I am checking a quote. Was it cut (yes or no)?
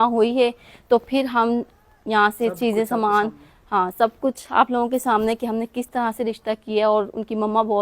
no